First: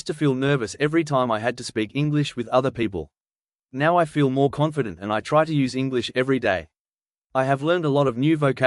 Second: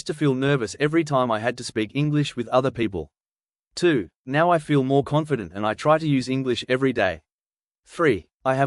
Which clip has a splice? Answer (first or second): first